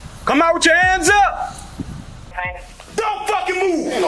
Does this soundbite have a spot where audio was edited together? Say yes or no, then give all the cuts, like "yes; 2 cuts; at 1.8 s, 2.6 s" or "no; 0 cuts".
yes; 1 cut; at 2.7 s